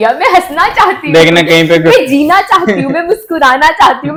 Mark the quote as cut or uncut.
uncut